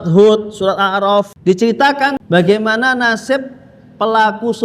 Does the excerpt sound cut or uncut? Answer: cut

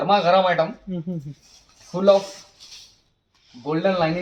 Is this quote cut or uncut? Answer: uncut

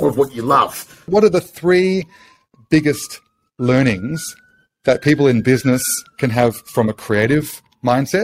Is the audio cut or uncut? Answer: cut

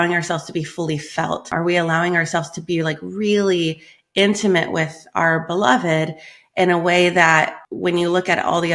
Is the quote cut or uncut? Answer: cut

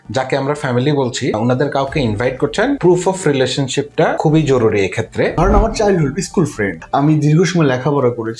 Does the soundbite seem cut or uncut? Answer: cut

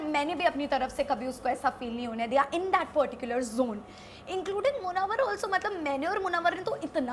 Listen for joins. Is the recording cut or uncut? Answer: uncut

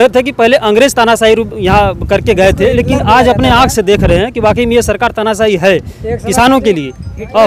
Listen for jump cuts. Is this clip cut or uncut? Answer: uncut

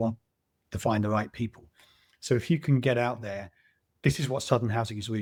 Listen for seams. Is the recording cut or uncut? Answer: uncut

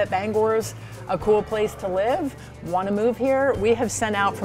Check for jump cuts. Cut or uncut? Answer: uncut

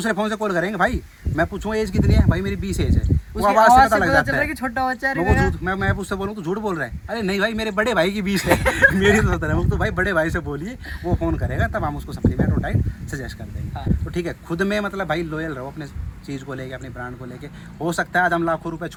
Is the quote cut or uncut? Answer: uncut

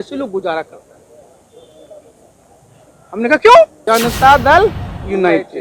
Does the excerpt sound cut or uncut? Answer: cut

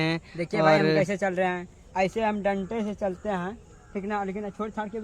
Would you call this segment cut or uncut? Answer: uncut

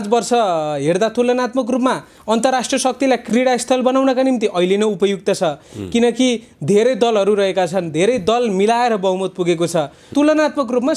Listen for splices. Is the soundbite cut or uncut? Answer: cut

